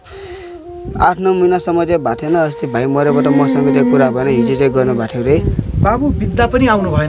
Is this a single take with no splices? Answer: yes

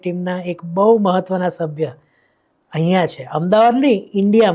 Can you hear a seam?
no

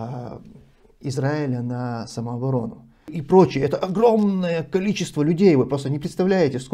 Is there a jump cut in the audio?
yes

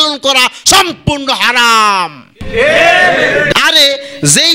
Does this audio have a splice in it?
yes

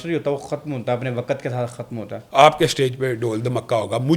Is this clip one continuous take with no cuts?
no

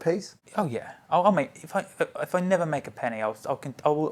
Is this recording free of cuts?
yes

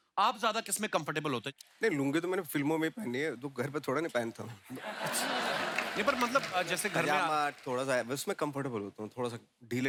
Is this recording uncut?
yes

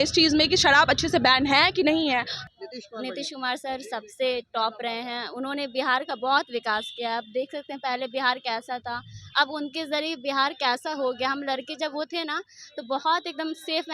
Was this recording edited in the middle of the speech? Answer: yes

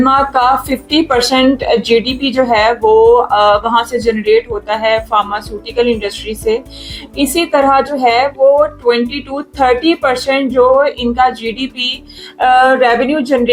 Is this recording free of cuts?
yes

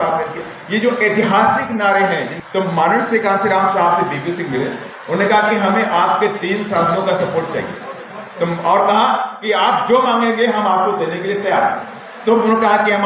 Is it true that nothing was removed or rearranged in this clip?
no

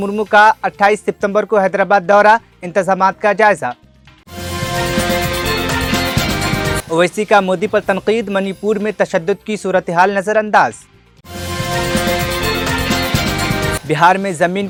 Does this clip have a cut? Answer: no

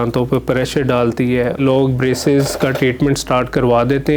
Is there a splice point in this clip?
yes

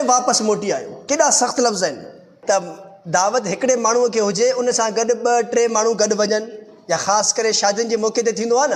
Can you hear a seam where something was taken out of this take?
yes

